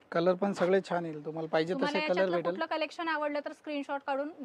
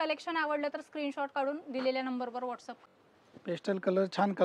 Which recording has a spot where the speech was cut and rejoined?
second; 1 cut; at 2.7 s

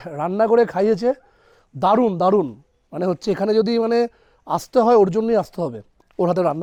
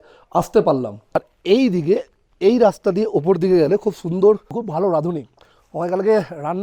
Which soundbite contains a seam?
second; 2 cuts; at 1.3 s, 4.6 s

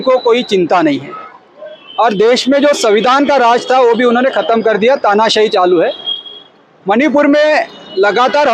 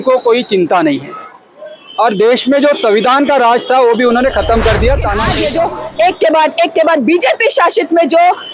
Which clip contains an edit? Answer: second; 1 cut; at 5.2 s

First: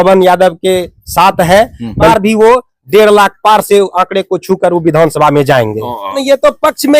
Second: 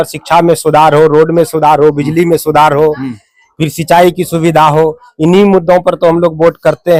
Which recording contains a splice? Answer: first; 2 cuts; at 2.1 s, 6.2 s

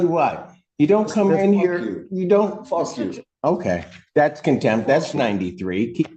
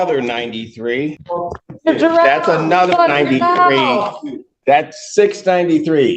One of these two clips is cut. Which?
second; 1 cut; at 1.2 s

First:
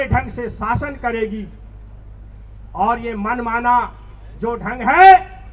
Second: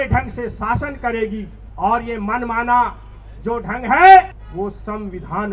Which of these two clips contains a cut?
second; 2 cuts; at 1.6 s, 4.4 s

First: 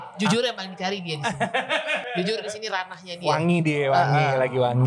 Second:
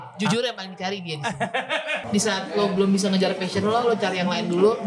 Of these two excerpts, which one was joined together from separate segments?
second; 1 cut; at 2.0 s

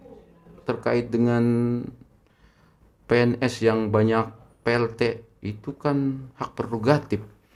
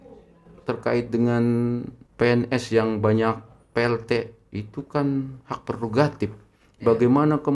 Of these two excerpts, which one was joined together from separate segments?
second; 1 cut; at 2.0 s

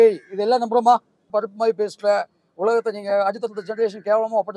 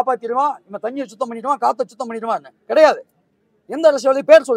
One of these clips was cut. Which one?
first; 1 cut; at 1.2 s

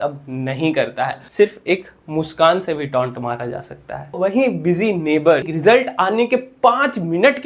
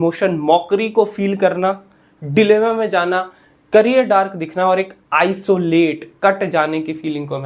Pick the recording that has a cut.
first; 3 cuts; at 1.2 s, 4.2 s, 5.5 s

